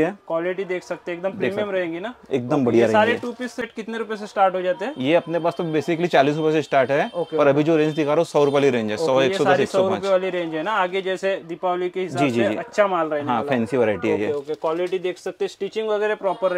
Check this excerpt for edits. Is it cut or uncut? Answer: uncut